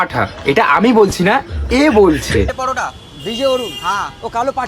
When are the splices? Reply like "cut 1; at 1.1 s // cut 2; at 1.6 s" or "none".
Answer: cut 1; at 2.5 s